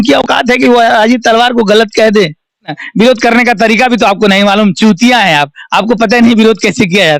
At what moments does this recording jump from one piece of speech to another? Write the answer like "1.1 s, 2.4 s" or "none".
2.8 s

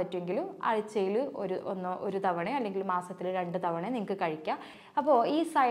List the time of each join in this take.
4.8 s

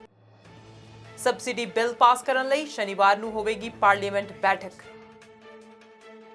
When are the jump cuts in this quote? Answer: 1.0 s

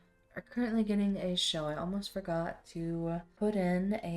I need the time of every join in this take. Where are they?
3.3 s

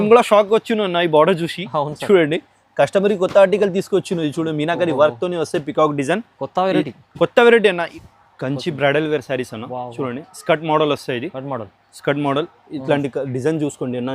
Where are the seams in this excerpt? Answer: 7.9 s

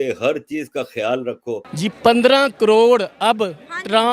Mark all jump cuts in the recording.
1.7 s

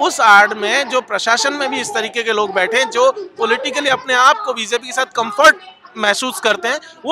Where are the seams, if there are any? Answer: none

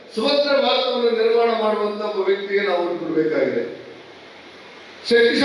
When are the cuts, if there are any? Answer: none

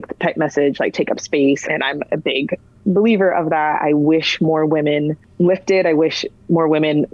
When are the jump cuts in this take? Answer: 1.6 s, 5.2 s

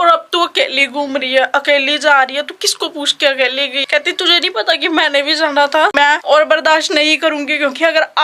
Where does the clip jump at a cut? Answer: 3.8 s, 6.1 s

